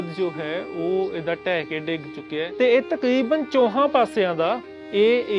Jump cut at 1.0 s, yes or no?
no